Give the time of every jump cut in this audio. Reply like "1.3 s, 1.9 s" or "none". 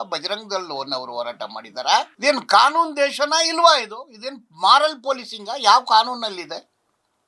2.1 s